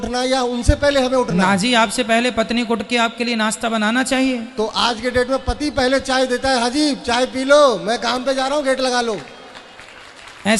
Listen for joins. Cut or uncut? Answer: uncut